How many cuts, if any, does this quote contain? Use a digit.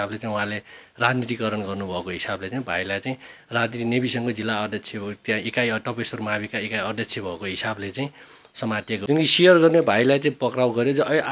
1